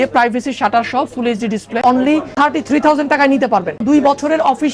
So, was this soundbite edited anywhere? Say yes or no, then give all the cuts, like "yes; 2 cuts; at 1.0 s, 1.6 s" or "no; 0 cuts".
yes; 2 cuts; at 1.8 s, 3.8 s